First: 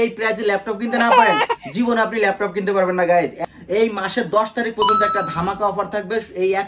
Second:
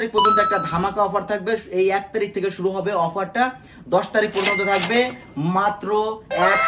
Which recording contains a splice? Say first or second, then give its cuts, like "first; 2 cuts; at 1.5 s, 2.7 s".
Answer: first; 1 cut; at 3.4 s